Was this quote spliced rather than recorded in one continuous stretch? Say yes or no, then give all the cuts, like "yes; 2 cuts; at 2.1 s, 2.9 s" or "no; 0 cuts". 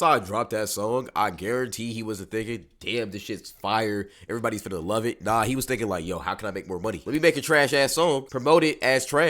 no; 0 cuts